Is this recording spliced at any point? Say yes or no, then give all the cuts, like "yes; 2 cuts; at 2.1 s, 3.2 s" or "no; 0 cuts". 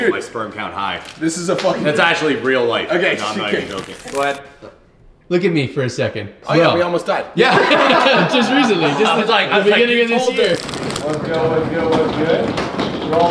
yes; 3 cuts; at 4.0 s, 6.4 s, 10.8 s